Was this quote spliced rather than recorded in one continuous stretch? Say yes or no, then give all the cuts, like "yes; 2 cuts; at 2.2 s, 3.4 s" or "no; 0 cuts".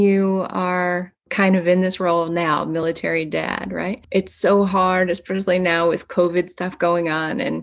yes; 2 cuts; at 1.3 s, 4.0 s